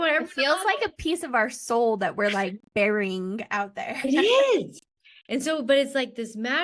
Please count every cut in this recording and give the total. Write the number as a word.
zero